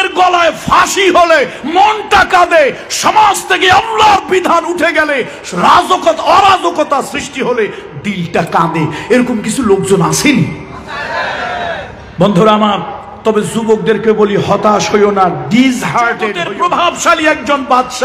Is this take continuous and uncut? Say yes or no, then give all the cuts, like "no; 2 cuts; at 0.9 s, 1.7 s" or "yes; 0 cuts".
no; 1 cut; at 16.3 s